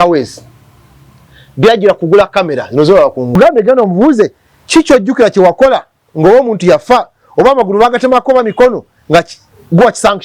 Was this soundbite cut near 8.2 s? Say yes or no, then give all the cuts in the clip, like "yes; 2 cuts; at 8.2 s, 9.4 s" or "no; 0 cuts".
no; 1 cut; at 3.3 s